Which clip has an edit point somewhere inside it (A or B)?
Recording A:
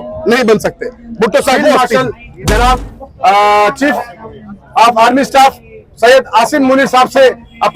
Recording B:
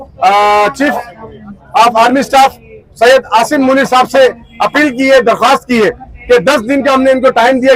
A